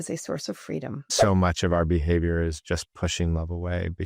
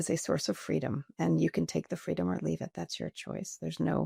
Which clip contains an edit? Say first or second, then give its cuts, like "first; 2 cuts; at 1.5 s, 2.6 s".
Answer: first; 1 cut; at 1.1 s